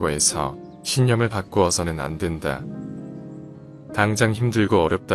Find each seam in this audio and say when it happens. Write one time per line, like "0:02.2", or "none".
none